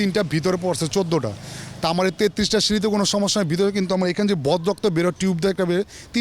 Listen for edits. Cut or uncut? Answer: uncut